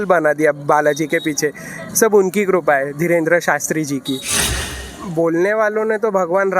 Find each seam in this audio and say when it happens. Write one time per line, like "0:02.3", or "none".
0:04.5

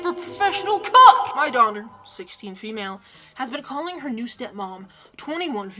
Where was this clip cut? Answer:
0:01.3

